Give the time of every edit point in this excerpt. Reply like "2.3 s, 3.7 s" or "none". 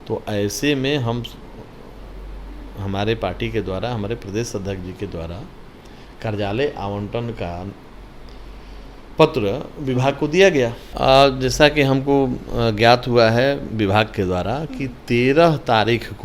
10.8 s